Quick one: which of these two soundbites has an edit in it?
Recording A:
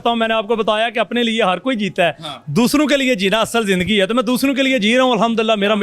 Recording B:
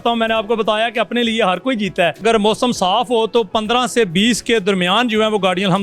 B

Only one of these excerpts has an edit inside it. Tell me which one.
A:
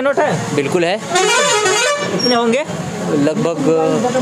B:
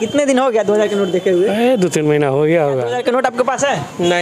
B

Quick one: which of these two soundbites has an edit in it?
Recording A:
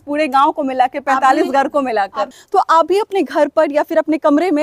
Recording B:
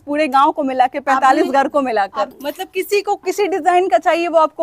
A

